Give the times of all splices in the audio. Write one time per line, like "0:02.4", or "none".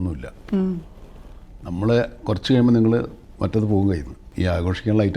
0:04.2